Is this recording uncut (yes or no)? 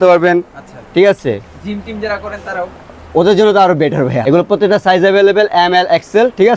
no